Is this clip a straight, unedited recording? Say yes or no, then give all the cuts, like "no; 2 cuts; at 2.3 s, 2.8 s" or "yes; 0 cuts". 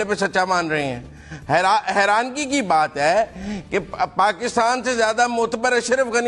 yes; 0 cuts